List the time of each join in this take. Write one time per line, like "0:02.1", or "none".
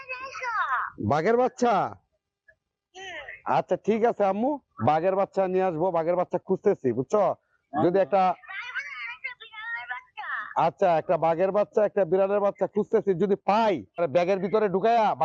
none